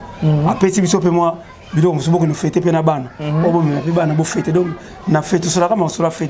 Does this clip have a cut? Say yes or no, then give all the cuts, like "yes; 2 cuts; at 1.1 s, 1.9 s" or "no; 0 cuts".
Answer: no; 0 cuts